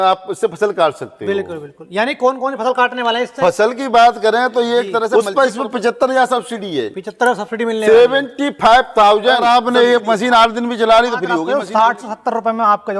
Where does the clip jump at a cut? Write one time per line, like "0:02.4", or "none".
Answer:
0:05.1
0:09.4
0:11.4